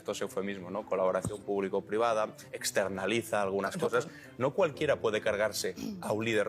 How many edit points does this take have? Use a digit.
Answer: 1